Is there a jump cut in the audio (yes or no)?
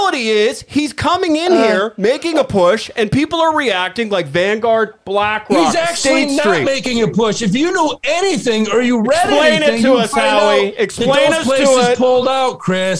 no